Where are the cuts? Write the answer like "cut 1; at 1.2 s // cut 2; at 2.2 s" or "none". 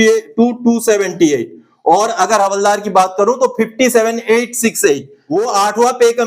cut 1; at 5.2 s